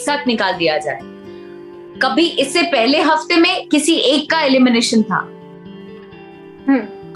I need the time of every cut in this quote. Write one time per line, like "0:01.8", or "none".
none